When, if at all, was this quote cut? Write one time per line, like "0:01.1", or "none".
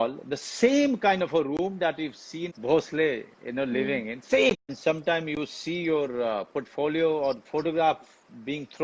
0:02.5
0:04.7

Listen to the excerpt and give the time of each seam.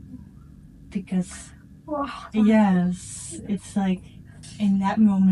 none

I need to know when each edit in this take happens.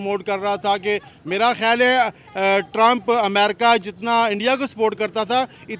none

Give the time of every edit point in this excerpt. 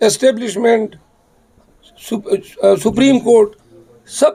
none

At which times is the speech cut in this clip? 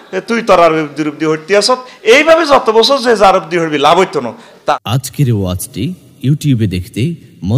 0:04.5

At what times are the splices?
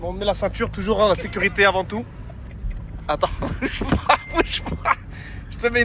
none

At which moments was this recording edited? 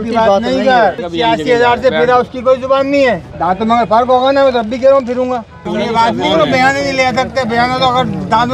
0:01.0
0:03.3
0:05.6

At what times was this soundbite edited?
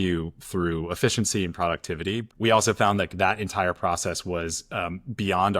0:02.2

